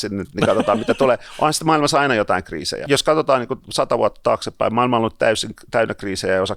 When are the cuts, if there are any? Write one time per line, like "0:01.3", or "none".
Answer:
0:02.8